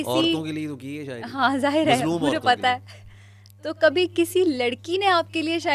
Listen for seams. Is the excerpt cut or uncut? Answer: uncut